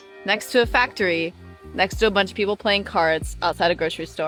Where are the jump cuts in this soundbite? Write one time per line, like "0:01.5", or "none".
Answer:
none